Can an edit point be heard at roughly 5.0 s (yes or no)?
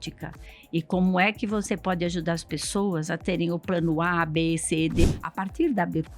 yes